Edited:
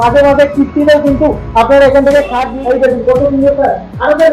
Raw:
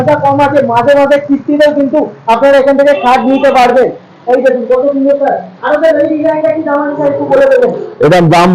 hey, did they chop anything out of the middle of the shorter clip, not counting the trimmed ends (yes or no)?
yes